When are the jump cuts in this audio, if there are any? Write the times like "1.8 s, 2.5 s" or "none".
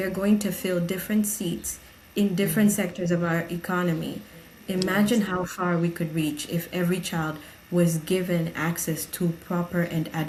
none